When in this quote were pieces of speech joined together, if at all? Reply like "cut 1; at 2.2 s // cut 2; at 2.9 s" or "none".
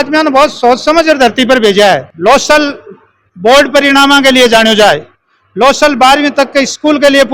cut 1; at 2.1 s

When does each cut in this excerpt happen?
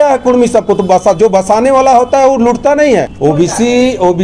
none

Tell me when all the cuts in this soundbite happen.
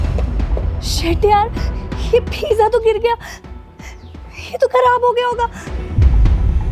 none

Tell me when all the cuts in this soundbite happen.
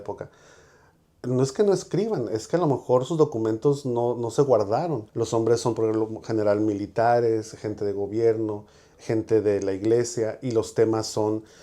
cut 1; at 5.0 s

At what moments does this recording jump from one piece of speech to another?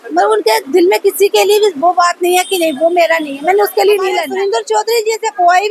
cut 1; at 4.3 s

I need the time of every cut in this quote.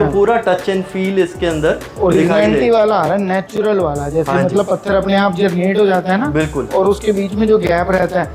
none

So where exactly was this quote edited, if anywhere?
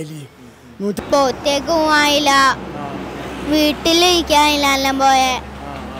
cut 1; at 0.9 s

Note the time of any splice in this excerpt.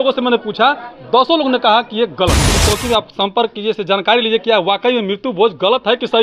cut 1; at 2.5 s

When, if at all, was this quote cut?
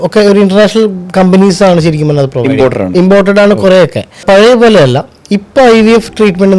cut 1; at 4.2 s

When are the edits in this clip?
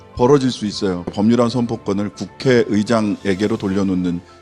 cut 1; at 1.1 s

